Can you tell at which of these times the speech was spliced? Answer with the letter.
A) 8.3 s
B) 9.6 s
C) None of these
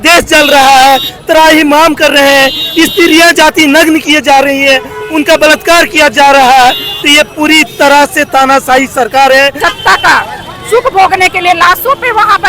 B